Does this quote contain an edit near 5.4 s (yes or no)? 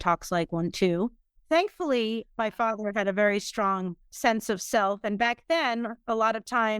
no